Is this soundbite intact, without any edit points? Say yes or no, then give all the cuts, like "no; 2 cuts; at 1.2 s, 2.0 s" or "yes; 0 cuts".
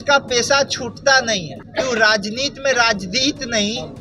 no; 1 cut; at 1.6 s